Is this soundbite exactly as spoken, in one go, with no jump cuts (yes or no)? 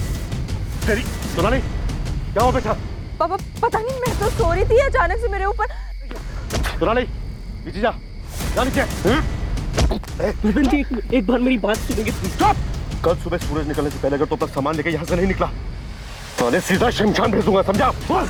yes